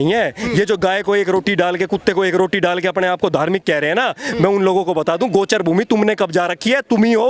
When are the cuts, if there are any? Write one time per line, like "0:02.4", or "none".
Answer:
none